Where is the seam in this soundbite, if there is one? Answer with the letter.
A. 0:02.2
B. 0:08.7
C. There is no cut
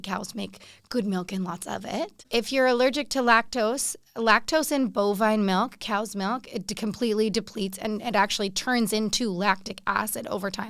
A